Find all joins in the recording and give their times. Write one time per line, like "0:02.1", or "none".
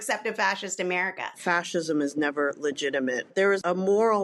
0:01.4
0:03.5